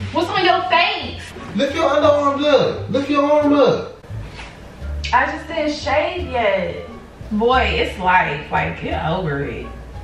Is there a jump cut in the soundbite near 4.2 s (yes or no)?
no